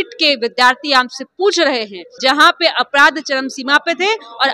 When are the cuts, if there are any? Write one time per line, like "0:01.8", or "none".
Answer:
0:02.0

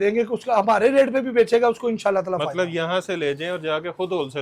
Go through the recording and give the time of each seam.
none

